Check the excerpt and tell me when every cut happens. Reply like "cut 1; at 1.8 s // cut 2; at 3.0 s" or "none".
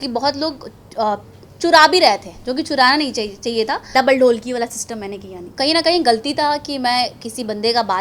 cut 1; at 3.8 s // cut 2; at 5.5 s